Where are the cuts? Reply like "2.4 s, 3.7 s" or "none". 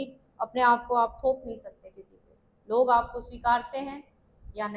none